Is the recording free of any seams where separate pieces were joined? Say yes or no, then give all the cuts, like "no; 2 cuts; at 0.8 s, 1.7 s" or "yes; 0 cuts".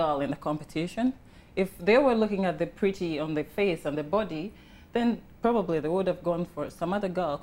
yes; 0 cuts